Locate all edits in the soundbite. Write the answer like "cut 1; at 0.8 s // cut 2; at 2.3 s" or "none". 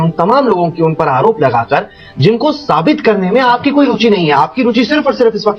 none